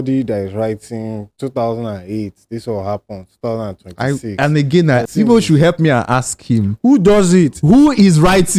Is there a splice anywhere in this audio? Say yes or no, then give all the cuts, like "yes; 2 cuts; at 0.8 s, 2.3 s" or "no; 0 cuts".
yes; 1 cut; at 5.0 s